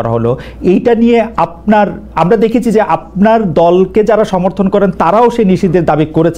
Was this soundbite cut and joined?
no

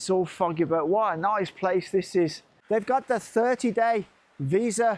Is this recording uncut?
no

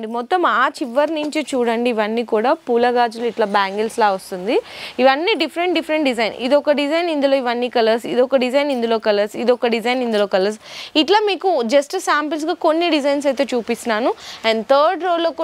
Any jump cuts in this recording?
no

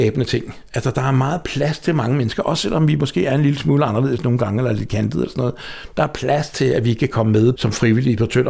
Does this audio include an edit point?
yes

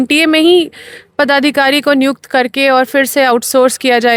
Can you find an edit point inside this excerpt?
no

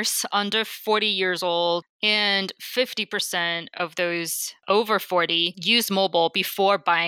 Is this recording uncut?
no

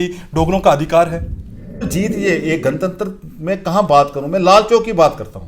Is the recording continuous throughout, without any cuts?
no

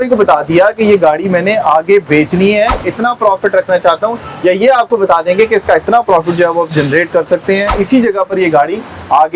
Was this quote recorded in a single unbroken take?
no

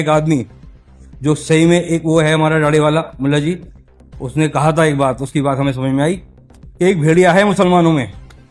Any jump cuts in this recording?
no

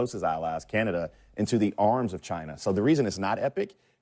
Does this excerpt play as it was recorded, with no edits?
yes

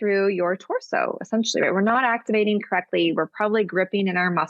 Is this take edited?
no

